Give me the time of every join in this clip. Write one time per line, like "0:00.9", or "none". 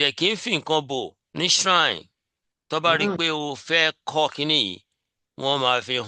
0:01.2